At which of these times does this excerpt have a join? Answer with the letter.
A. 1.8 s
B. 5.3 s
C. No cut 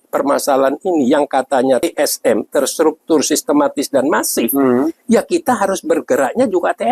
A